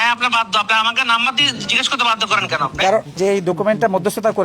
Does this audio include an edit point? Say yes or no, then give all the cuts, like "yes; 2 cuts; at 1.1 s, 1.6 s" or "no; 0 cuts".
yes; 1 cut; at 3.1 s